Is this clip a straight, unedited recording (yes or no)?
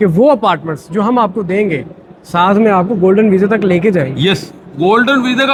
yes